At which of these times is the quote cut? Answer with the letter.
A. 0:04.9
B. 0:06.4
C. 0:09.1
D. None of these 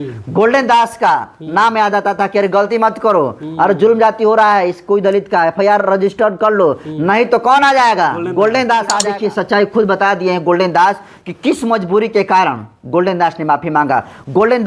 C